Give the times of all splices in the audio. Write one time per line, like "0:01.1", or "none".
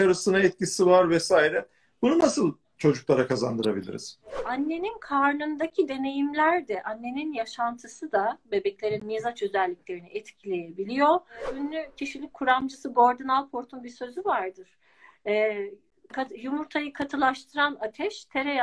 0:04.4
0:11.5